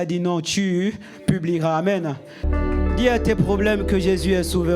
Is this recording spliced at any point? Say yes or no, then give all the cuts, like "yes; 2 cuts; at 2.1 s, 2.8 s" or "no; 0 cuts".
yes; 1 cut; at 2.5 s